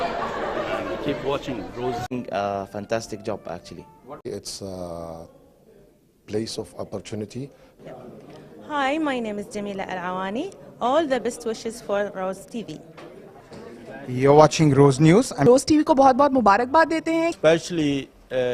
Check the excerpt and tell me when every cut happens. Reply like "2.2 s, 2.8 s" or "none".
none